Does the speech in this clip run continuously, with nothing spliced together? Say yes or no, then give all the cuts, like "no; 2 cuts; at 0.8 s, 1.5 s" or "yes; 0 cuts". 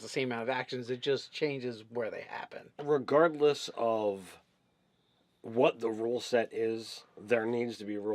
no; 1 cut; at 1.8 s